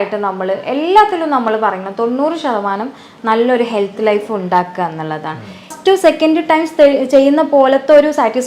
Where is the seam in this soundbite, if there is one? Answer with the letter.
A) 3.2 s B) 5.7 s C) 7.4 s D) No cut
B